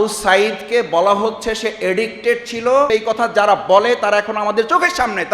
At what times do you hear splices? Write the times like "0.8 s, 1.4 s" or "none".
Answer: 2.9 s